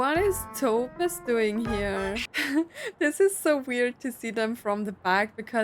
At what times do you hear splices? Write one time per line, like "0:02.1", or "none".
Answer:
0:02.3